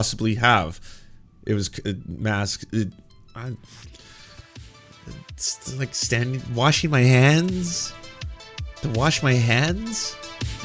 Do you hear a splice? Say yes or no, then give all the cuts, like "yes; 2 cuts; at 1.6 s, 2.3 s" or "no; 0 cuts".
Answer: no; 0 cuts